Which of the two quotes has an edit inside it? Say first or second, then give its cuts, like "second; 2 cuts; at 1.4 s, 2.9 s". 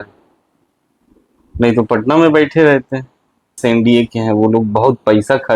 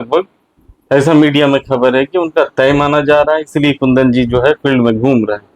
first; 1 cut; at 3.6 s